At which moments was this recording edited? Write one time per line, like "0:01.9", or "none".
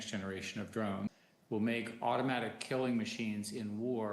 0:01.1

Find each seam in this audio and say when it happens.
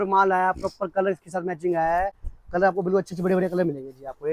none

